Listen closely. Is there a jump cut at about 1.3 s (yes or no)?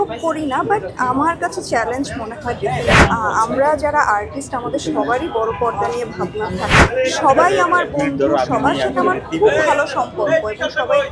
no